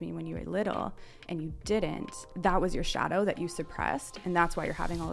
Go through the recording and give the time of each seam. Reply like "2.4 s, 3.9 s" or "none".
2.2 s